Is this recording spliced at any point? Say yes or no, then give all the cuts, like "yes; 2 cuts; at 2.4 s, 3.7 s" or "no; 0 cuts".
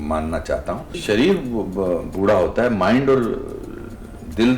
yes; 1 cut; at 1.0 s